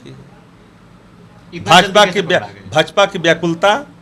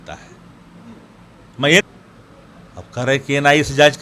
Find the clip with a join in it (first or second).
second